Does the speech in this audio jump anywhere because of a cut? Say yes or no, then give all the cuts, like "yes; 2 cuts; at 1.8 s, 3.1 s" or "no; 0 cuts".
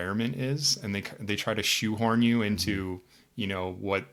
no; 0 cuts